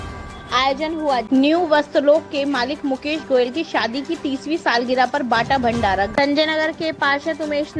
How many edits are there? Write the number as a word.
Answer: two